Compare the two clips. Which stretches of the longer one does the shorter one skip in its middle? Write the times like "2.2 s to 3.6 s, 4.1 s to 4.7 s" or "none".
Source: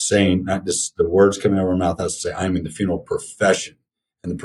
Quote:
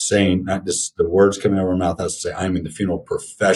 none